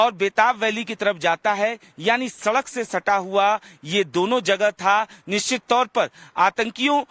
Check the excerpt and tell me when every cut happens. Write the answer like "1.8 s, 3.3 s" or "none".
3.7 s